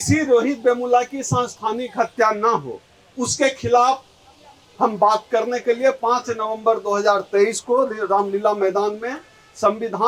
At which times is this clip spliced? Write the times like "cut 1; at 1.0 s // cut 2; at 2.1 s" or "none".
none